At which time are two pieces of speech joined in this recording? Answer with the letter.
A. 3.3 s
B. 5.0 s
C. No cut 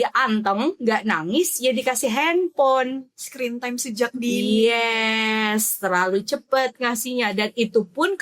C